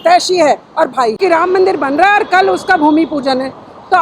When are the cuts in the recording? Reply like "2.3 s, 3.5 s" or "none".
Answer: 1.2 s